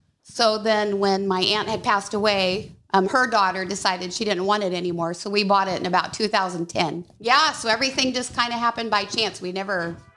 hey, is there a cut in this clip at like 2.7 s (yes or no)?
no